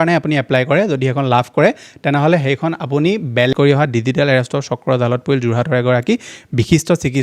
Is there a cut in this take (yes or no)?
yes